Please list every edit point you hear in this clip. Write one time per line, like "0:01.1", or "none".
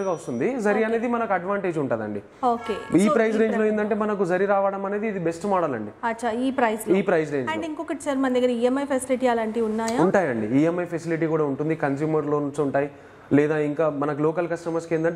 none